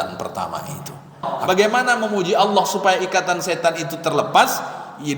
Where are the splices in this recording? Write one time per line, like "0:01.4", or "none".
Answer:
0:01.3